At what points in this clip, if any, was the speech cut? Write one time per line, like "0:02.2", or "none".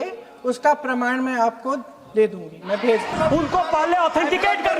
0:03.1